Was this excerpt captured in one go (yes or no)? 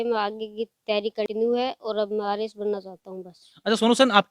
no